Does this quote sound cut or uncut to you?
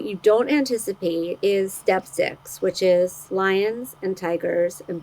cut